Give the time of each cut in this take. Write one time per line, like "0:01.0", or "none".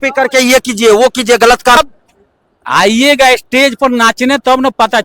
0:01.8

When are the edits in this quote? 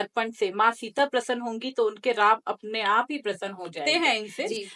0:03.8

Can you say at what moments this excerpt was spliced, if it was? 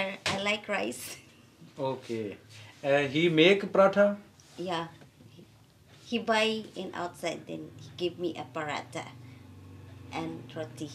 none

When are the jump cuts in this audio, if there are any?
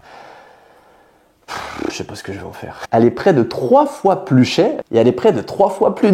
0:02.8

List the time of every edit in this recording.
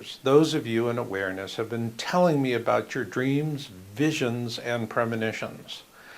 0:02.4

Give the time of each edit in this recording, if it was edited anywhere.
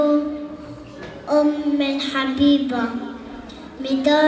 none

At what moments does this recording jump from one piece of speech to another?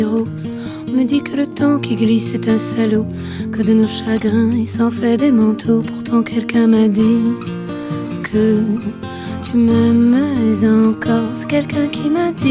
none

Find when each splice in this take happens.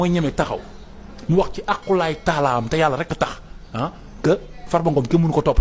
none

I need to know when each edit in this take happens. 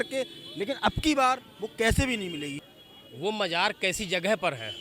0:02.7

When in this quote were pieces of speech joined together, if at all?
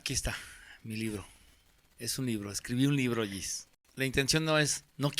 0:03.6

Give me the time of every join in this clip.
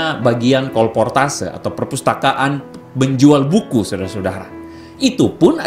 none

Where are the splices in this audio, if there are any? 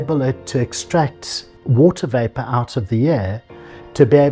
0:01.5

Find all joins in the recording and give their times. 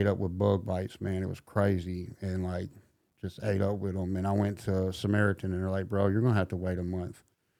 none

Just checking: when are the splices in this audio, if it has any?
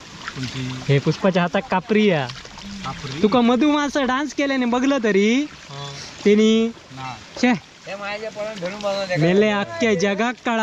none

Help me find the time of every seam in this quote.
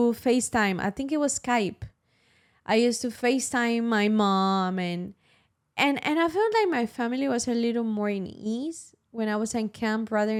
none

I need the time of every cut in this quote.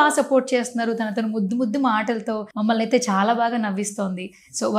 0:02.5

